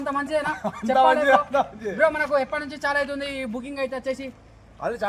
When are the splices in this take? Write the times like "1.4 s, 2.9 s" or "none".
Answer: none